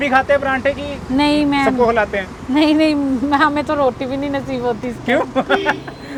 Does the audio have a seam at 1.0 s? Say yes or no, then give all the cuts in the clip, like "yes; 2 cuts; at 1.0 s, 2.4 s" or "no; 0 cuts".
no; 0 cuts